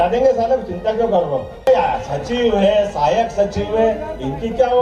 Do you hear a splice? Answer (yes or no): yes